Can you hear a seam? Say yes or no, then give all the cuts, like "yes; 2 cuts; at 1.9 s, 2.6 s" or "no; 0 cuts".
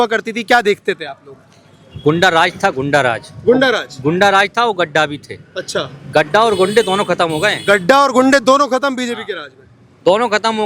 no; 0 cuts